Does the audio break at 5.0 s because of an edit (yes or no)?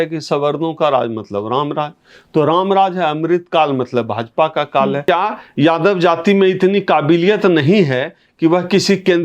yes